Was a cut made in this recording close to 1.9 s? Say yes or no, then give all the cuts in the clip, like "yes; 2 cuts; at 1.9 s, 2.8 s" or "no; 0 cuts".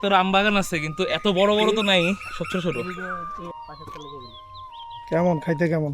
no; 1 cut; at 3.5 s